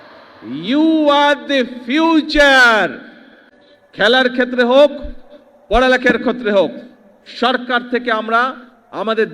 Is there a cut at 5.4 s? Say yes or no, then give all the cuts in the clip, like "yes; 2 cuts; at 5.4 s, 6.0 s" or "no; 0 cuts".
no; 1 cut; at 3.4 s